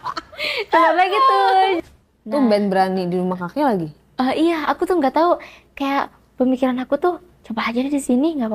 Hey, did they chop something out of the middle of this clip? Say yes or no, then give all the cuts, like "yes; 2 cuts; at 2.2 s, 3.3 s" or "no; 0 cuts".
yes; 1 cut; at 1.9 s